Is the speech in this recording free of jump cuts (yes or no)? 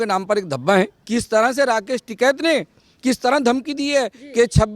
no